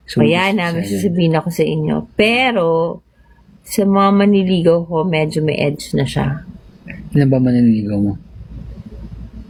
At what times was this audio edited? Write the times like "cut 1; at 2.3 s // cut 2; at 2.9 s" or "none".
none